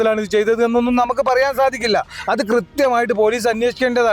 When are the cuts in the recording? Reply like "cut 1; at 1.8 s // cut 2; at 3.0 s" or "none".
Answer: none

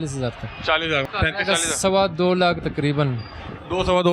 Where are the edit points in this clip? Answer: cut 1; at 1.0 s

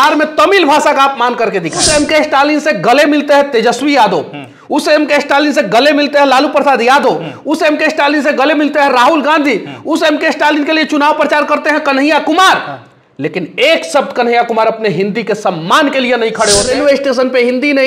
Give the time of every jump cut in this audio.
cut 1; at 1.8 s // cut 2; at 16.7 s

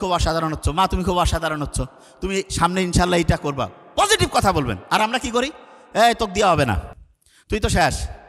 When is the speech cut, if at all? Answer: none

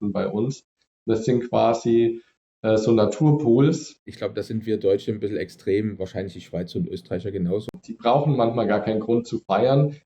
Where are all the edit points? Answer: cut 1; at 4.1 s // cut 2; at 7.7 s

